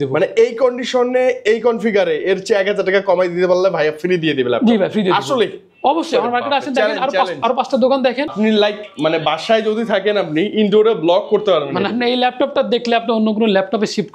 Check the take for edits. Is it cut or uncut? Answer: cut